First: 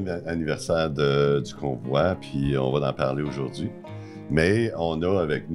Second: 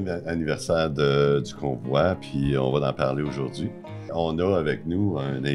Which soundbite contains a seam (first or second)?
second